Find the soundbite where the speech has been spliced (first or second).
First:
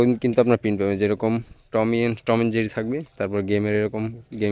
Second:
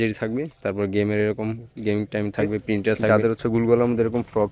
second